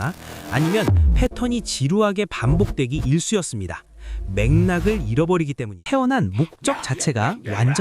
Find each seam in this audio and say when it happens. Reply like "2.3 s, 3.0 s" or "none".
5.8 s